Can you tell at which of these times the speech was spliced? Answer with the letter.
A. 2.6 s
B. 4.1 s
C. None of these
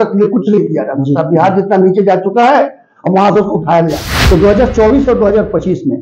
B